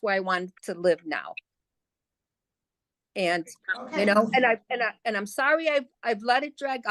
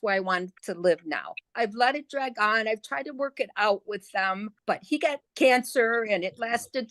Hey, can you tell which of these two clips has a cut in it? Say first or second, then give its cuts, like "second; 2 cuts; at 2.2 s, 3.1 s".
second; 2 cuts; at 1.4 s, 5.0 s